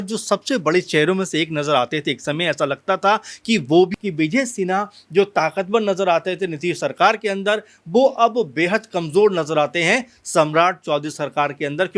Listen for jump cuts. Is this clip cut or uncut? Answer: cut